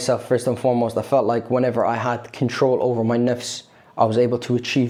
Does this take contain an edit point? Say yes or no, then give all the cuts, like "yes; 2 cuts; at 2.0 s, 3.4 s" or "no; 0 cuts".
no; 0 cuts